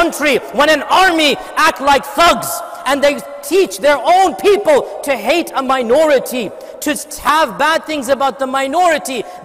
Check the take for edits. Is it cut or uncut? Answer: uncut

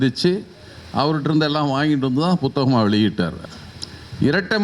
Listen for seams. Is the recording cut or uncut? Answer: cut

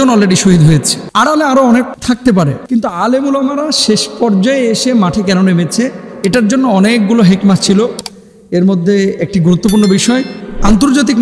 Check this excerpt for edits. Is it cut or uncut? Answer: uncut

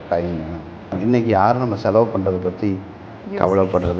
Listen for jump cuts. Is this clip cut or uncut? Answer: cut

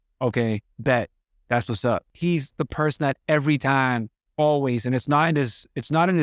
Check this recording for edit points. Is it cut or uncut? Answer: cut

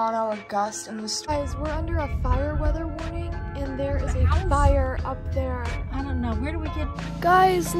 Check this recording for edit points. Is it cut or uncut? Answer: cut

